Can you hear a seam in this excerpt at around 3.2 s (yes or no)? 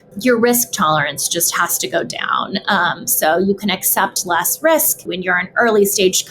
no